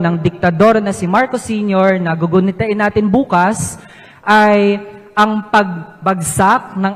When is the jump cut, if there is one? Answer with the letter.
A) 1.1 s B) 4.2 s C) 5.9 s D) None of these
D